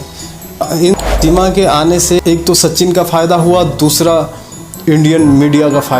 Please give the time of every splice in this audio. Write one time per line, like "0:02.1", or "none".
0:00.9